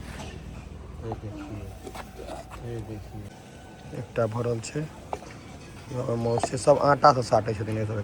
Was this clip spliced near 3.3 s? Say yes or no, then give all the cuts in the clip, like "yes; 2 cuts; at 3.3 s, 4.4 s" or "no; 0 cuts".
yes; 1 cut; at 3.3 s